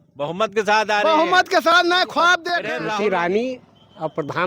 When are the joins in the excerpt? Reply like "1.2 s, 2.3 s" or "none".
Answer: 2.7 s